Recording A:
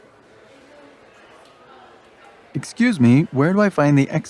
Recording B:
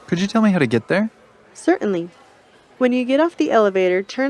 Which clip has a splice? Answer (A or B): B